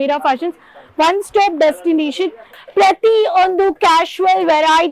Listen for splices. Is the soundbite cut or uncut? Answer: cut